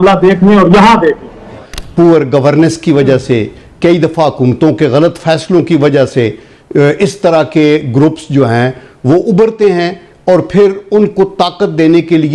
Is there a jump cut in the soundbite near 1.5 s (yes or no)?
yes